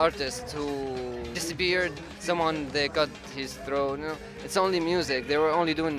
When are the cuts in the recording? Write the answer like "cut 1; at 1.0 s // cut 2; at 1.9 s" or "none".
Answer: cut 1; at 1.3 s // cut 2; at 2.1 s

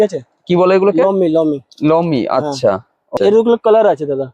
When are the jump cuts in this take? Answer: cut 1; at 3.2 s

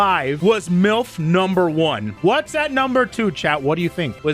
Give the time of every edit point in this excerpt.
cut 1; at 2.1 s

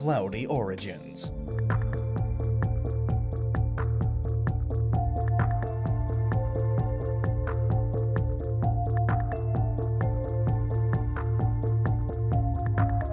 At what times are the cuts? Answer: cut 1; at 9.4 s

